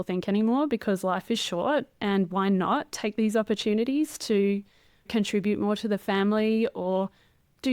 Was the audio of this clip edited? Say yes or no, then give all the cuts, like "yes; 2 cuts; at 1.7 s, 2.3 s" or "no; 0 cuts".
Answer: yes; 1 cut; at 5.1 s